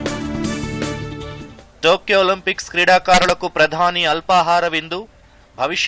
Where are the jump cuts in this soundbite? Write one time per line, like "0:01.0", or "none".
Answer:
0:01.2